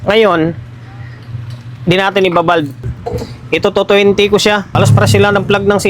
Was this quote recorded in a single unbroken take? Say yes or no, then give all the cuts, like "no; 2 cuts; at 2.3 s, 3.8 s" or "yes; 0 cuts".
no; 2 cuts; at 2.9 s, 4.7 s